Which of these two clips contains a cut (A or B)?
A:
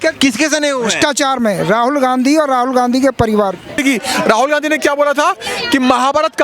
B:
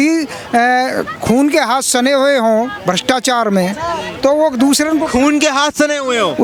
A